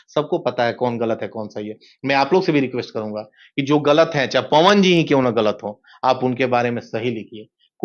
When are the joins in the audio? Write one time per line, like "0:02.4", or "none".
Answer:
none